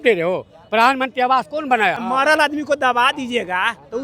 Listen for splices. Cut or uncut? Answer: cut